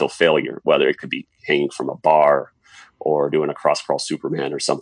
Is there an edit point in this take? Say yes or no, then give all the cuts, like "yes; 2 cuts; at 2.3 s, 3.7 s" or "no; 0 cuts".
no; 0 cuts